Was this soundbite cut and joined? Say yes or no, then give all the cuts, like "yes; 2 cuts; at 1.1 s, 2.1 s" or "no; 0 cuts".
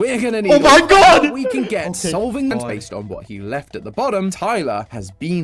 yes; 1 cut; at 2.5 s